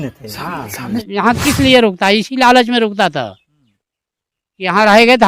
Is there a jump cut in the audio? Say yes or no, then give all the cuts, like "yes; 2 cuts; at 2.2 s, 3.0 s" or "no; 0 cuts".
yes; 1 cut; at 1.1 s